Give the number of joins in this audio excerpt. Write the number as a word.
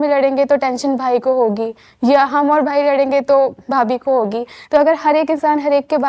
zero